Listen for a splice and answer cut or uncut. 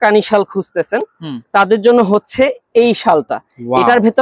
uncut